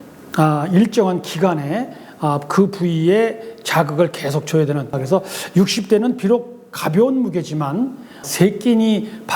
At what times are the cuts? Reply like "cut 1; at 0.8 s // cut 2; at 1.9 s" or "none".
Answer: cut 1; at 4.9 s // cut 2; at 8.2 s